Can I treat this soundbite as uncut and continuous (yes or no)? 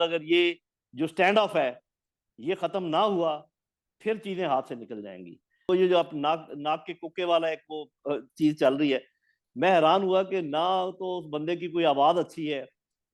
no